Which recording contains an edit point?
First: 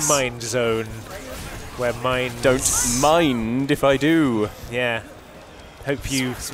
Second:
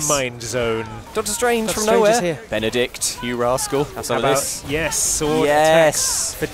second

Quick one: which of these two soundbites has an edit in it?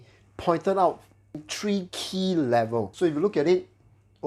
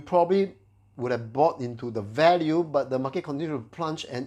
first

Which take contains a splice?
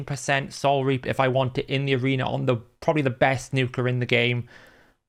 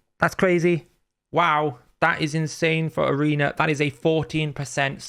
second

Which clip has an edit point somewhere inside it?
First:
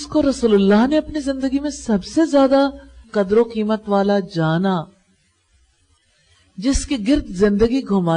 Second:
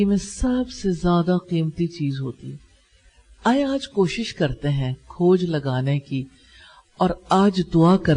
first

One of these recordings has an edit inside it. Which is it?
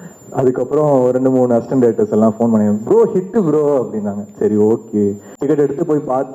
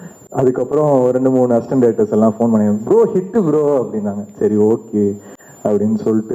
first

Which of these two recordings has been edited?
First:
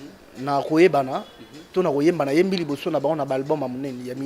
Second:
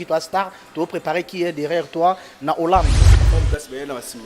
second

